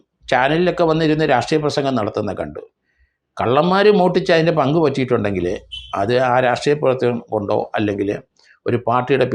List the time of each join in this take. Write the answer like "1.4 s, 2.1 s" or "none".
none

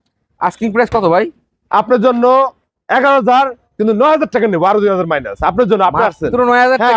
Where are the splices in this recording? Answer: none

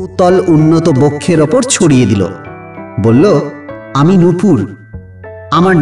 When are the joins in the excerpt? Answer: 2.6 s

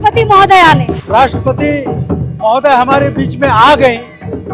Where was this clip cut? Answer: 1.0 s

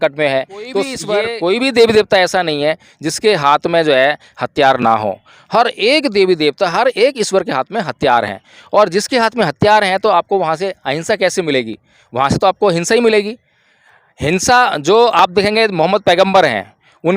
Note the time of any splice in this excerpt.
0.9 s

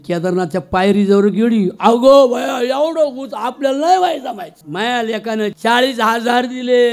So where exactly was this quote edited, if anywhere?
4.5 s, 5.6 s

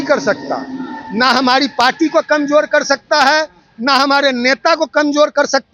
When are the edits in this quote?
none

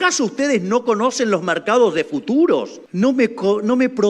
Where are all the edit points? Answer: 2.8 s

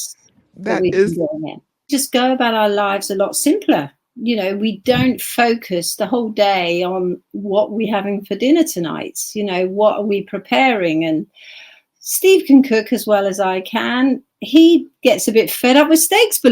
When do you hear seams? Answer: 1.9 s

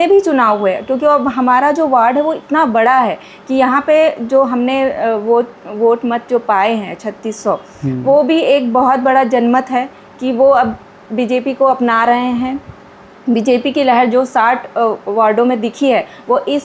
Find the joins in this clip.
none

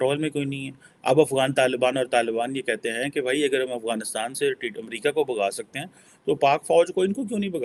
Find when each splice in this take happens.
none

